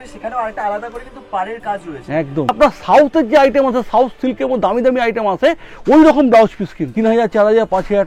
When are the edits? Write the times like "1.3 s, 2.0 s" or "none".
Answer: 2.5 s, 6.8 s